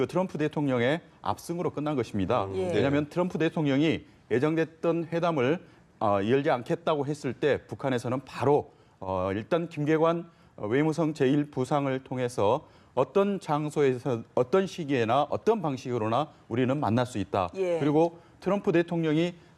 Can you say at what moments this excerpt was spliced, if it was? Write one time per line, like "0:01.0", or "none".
0:14.9